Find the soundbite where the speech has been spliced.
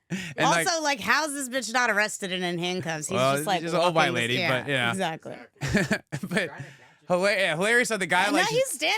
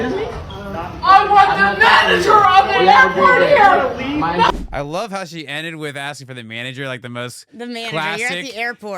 second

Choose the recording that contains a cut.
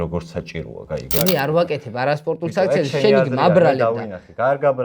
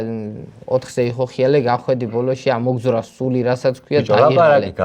first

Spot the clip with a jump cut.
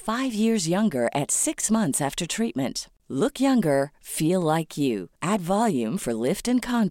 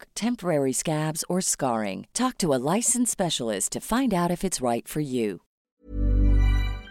second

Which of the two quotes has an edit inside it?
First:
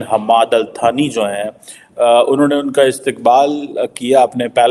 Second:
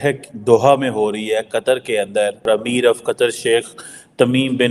second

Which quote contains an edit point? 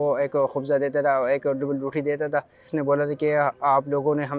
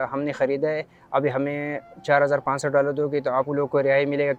first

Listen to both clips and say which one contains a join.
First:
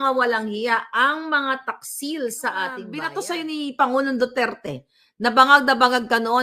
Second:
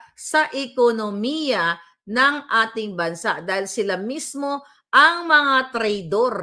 first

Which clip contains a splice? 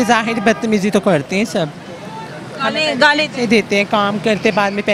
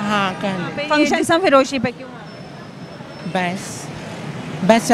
second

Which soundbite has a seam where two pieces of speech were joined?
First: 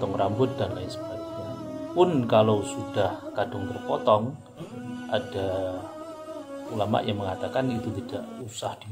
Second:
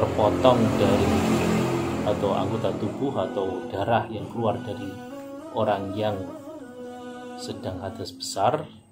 second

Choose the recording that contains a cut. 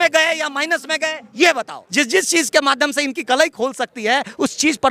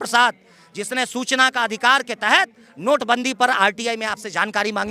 first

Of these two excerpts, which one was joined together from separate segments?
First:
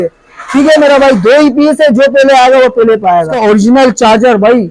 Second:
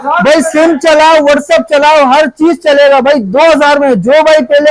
first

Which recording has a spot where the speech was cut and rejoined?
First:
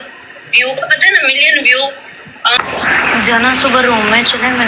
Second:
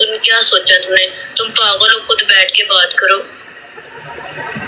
first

